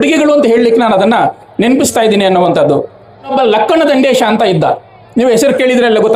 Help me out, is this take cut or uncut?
cut